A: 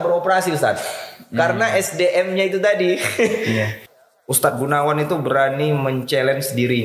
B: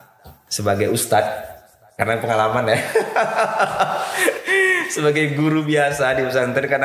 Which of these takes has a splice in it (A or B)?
A